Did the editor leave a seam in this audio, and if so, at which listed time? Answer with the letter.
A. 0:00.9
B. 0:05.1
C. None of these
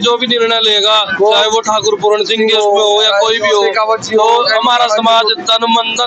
C